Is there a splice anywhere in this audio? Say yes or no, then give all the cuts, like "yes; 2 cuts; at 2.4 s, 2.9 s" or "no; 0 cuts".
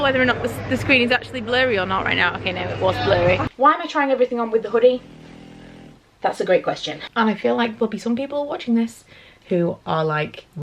yes; 2 cuts; at 3.5 s, 6.9 s